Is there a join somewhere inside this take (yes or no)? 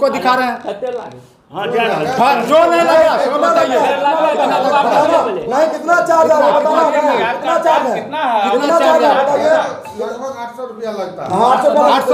no